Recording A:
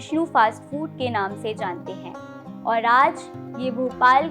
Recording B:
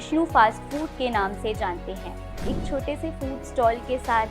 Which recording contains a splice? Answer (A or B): B